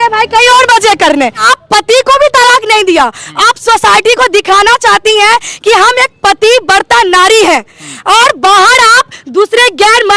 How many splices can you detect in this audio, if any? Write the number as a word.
one